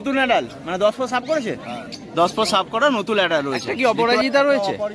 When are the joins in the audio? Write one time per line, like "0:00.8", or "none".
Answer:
0:03.7